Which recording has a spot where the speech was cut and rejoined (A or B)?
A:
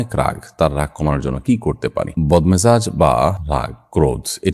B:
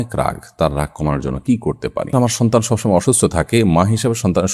B